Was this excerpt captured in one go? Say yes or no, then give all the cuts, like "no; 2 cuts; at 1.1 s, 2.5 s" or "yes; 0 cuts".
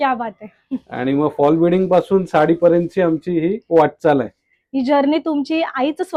yes; 0 cuts